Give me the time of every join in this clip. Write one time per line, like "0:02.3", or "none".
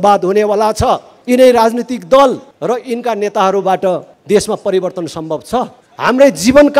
0:01.1
0:02.5
0:04.1
0:05.8